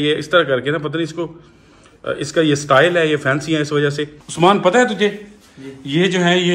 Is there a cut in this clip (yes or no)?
no